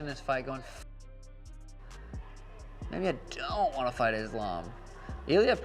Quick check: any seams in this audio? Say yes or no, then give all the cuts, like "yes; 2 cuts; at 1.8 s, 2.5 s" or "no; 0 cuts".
no; 0 cuts